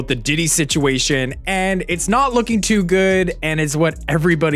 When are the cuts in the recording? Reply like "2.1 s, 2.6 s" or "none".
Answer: none